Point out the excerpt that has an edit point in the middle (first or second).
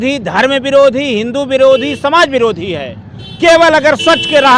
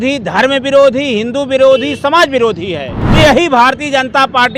second